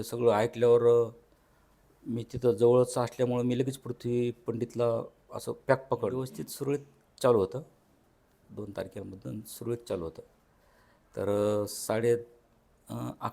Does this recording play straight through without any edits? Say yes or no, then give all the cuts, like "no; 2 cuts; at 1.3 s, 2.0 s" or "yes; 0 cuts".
no; 1 cut; at 6.2 s